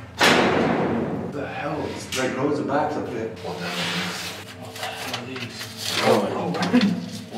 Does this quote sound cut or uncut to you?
cut